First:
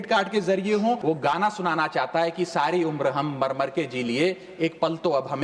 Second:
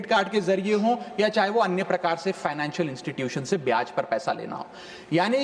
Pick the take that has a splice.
first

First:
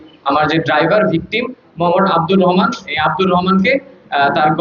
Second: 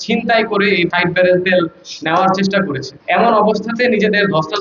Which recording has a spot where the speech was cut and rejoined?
second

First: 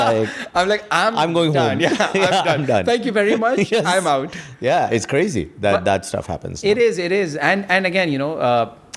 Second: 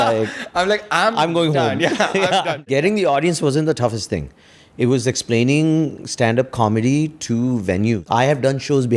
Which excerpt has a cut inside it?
second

